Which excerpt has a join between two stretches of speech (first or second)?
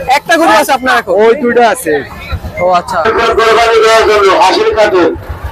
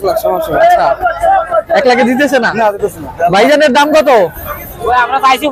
first